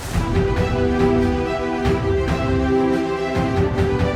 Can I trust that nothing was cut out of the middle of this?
yes; 0 cuts

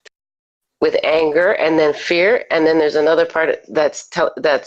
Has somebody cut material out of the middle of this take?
no; 0 cuts

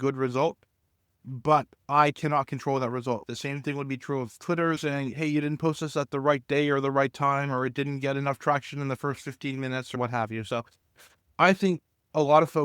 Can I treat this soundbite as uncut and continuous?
no; 2 cuts; at 3.3 s, 4.8 s

